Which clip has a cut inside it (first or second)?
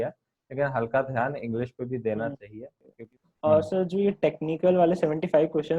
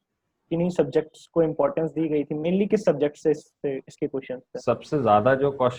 first